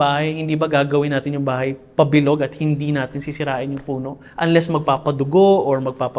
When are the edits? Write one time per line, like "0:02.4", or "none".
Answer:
none

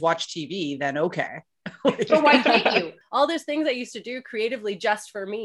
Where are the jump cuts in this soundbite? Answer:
0:03.0

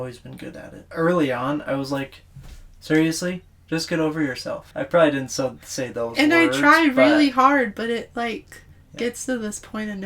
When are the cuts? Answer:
0:00.9
0:04.7

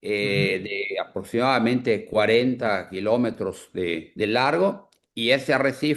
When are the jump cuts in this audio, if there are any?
0:04.1

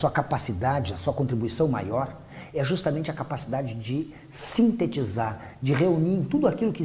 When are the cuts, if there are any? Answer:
0:04.5

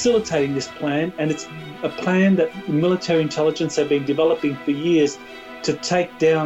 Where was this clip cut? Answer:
none

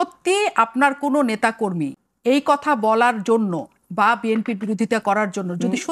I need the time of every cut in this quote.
0:02.0

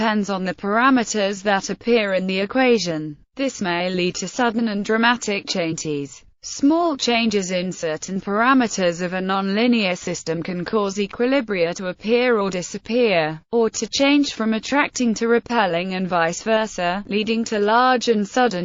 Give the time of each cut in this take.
none

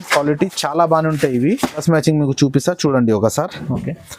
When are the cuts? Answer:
none

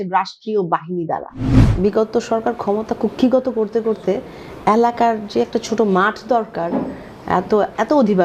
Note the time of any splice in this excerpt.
0:01.6

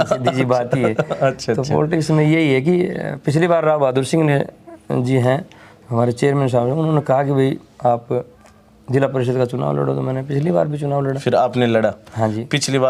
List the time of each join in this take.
none

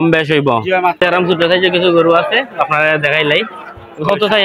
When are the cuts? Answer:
0:01.0

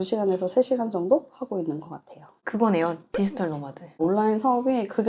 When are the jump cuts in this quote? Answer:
0:04.0

